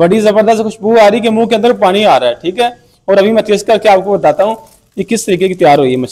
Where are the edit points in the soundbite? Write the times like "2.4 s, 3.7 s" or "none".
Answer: none

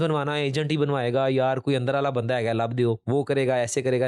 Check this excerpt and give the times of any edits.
none

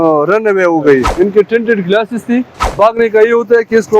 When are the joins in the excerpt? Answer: 1.1 s, 2.7 s

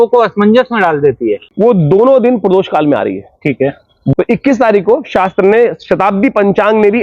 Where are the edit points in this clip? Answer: 1.4 s, 4.1 s

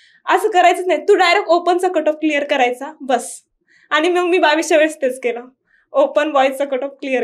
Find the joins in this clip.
none

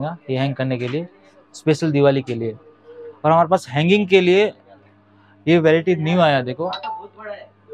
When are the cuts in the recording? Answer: none

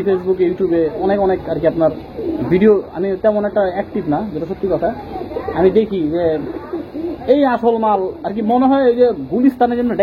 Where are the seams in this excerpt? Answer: none

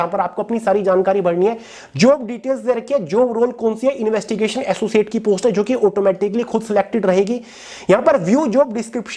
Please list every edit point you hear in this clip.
none

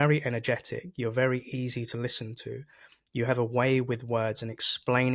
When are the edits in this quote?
none

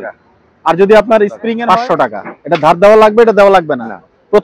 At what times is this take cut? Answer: 1.5 s

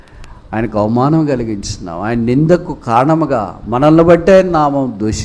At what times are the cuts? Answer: none

